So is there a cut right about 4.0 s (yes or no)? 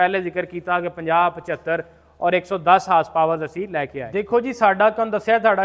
yes